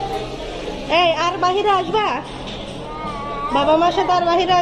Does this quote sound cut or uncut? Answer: uncut